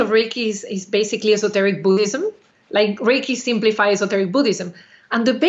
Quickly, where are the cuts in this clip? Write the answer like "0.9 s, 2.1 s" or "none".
none